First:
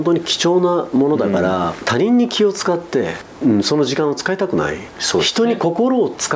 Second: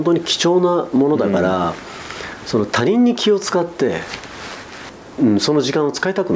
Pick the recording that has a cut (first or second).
first